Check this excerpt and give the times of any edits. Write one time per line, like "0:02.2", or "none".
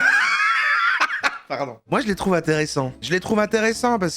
0:01.8

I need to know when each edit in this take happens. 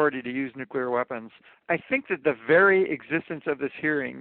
0:01.6

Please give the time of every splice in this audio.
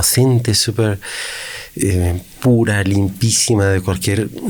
none

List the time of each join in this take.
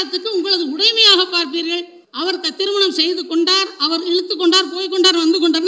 0:02.0

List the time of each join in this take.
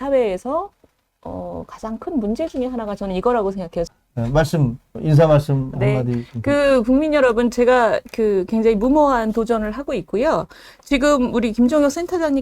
0:03.9

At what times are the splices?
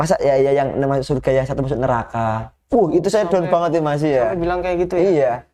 none

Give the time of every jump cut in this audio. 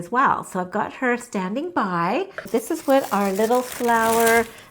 0:02.5

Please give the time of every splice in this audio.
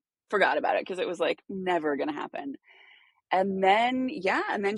none

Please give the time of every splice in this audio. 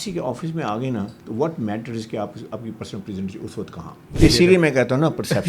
0:04.2

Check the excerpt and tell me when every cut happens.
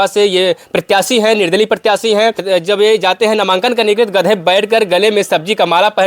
0:02.4

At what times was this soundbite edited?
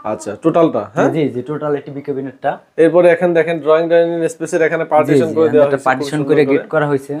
none

